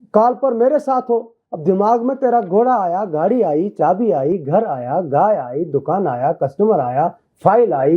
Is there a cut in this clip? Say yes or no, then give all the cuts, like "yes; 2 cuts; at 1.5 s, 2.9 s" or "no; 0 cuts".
no; 0 cuts